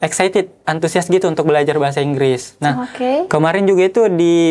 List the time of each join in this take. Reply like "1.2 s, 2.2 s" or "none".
none